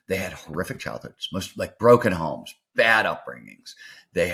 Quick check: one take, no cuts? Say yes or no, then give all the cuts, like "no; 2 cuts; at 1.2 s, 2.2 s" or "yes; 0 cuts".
yes; 0 cuts